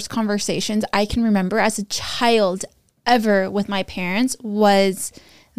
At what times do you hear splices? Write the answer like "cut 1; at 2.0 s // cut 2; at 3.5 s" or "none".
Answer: none

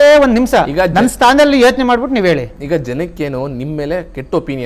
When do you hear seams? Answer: none

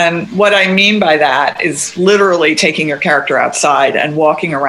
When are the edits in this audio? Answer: none

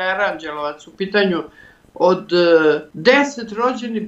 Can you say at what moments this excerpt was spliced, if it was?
cut 1; at 2.9 s

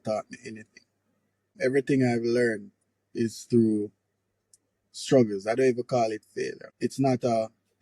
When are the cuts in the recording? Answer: cut 1; at 1.5 s // cut 2; at 6.6 s

